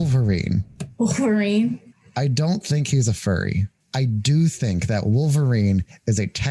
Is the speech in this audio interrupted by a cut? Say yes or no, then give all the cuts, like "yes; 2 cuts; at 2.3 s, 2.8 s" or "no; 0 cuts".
yes; 2 cuts; at 1.9 s, 3.8 s